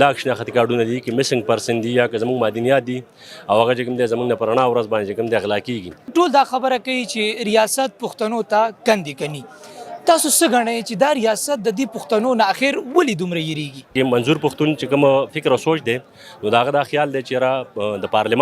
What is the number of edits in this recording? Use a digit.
2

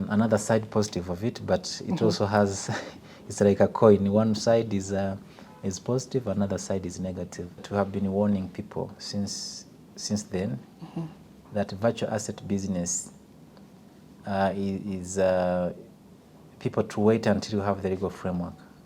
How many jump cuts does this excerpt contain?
1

